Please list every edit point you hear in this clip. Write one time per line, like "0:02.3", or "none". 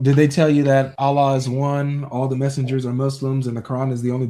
0:00.9